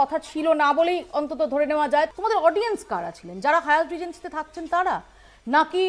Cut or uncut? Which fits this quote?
cut